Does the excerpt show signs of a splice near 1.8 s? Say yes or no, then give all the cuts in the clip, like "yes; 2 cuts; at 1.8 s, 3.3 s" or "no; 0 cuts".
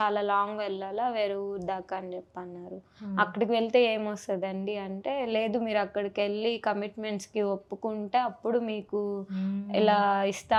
no; 0 cuts